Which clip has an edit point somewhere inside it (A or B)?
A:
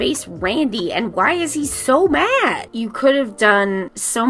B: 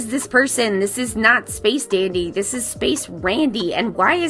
A